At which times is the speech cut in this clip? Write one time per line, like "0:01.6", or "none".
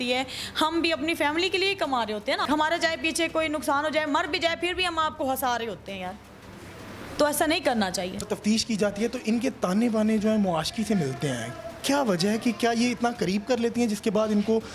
0:02.5
0:08.3